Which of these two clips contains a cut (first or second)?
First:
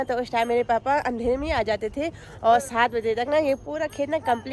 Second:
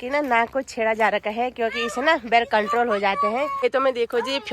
second